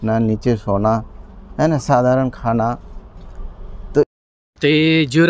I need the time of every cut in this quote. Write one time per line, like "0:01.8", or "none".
0:04.1